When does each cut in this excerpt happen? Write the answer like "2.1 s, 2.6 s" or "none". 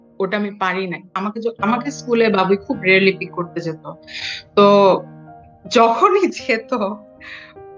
1.2 s